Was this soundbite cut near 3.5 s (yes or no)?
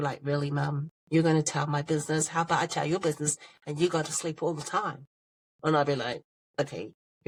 no